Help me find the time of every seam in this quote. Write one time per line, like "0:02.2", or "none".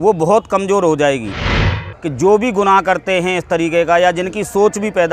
0:01.6